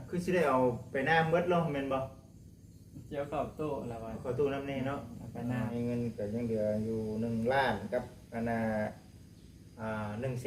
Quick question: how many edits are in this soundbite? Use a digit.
1